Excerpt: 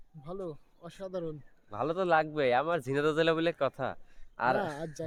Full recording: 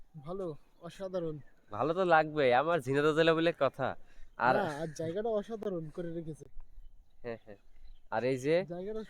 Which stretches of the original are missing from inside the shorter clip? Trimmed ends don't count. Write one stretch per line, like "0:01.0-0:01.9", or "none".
none